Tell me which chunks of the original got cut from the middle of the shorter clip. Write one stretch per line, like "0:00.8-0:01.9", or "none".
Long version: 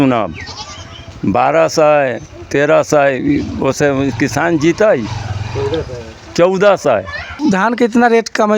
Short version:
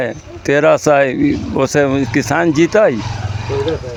none